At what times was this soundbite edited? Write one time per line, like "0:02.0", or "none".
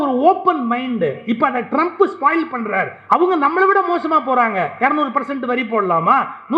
0:02.9